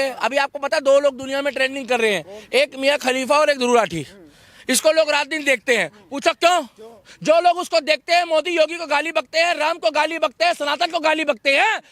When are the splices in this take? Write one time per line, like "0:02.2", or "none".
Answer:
none